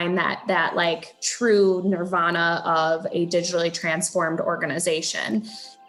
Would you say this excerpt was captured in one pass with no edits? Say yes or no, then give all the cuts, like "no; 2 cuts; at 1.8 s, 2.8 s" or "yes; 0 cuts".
yes; 0 cuts